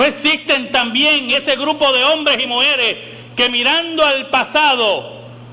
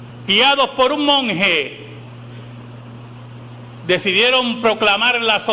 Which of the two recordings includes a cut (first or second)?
second